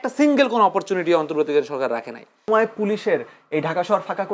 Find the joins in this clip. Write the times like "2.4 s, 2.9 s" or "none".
2.5 s